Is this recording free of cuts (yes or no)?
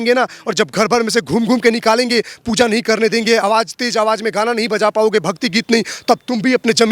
yes